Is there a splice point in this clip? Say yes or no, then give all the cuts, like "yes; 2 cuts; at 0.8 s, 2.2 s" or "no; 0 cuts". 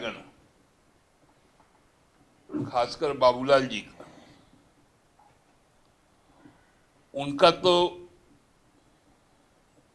no; 0 cuts